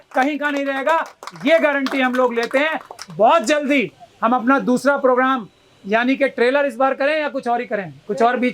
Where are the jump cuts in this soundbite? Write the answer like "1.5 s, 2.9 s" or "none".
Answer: none